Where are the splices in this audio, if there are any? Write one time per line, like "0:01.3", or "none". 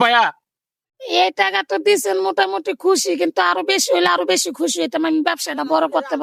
none